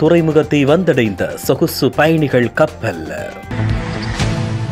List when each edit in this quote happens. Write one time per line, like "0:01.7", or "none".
0:03.4